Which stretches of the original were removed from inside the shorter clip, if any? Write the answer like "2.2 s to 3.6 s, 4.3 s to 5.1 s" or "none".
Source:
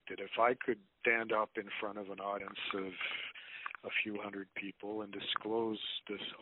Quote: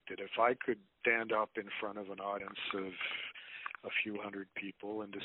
none